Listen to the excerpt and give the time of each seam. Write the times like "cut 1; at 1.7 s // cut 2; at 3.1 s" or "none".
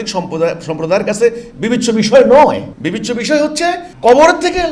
cut 1; at 2.7 s // cut 2; at 3.9 s